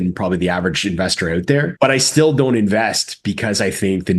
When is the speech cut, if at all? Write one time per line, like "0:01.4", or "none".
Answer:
0:01.7